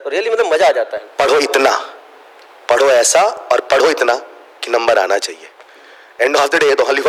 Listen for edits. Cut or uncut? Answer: cut